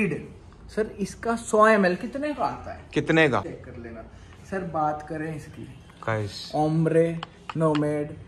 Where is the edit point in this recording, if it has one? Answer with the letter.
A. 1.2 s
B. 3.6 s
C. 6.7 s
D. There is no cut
B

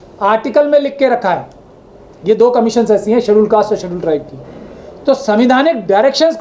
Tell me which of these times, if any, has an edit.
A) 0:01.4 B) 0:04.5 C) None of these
C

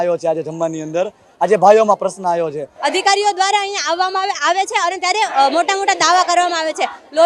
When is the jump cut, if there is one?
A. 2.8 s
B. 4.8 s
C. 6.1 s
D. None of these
A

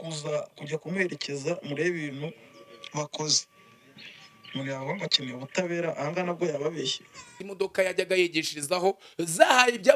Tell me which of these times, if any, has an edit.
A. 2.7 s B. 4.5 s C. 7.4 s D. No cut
C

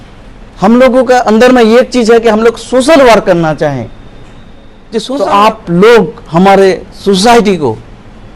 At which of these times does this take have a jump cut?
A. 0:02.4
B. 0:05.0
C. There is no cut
B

